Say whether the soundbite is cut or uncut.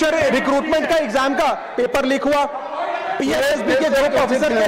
uncut